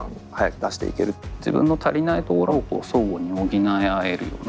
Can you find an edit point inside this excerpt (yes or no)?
yes